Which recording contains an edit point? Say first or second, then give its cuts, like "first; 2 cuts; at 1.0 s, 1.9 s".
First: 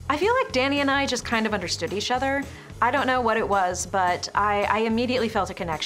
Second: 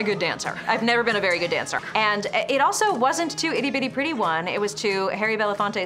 second; 1 cut; at 1.8 s